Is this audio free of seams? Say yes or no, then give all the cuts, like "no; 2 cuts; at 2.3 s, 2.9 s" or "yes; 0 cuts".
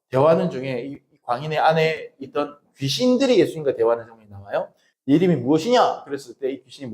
no; 1 cut; at 4.8 s